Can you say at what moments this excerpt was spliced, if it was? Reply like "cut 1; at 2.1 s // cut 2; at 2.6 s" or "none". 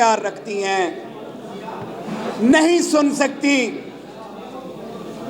none